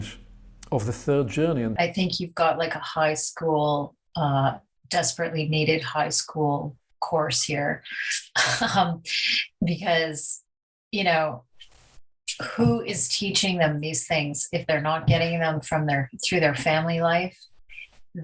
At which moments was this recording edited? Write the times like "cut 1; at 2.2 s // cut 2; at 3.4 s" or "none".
cut 1; at 1.7 s